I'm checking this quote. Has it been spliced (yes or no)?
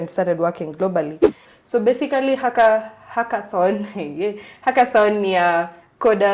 yes